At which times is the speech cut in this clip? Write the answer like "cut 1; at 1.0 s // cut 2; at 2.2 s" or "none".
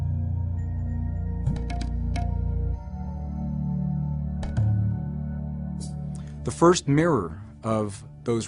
cut 1; at 5.7 s